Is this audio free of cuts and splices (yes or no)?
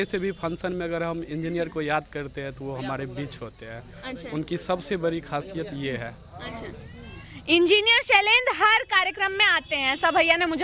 yes